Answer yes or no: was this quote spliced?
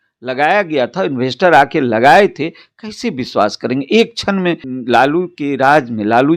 yes